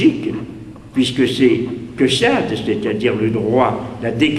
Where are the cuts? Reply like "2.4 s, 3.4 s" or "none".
1.3 s